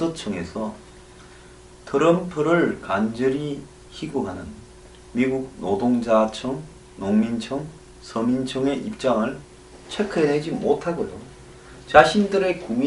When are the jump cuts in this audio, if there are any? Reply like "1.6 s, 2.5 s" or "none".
7.2 s